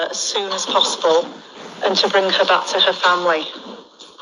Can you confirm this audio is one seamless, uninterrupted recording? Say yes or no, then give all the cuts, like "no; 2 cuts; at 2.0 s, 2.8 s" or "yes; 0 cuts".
yes; 0 cuts